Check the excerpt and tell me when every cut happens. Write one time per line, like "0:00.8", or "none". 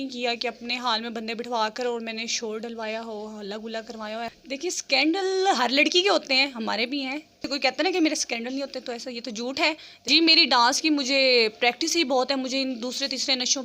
0:04.3
0:07.4
0:09.9